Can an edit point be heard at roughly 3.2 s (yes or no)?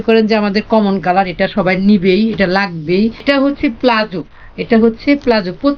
yes